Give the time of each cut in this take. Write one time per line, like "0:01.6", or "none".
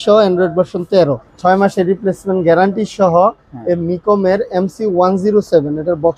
0:01.3